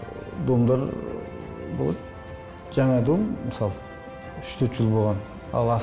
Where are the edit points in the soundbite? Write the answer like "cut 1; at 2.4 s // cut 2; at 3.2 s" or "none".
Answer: none